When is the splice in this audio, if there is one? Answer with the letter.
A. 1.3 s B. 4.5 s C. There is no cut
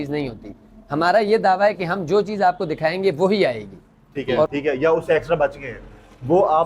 B